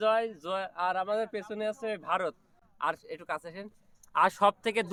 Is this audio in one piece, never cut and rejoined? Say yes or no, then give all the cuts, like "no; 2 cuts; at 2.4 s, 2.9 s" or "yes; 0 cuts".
yes; 0 cuts